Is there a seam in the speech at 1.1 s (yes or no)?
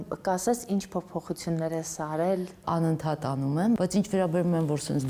no